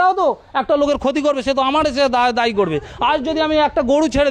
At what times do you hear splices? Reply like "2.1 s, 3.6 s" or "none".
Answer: none